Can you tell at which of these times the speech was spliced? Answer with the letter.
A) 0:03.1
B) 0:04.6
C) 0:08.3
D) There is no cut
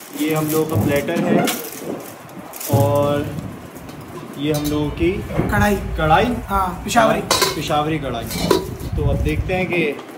D